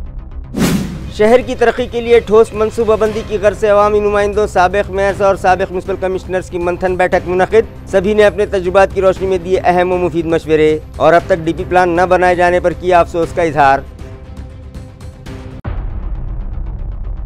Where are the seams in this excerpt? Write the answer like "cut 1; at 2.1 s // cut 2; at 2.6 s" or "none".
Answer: cut 1; at 1.0 s